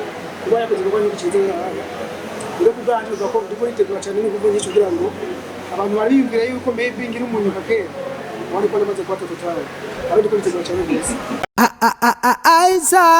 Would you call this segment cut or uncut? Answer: cut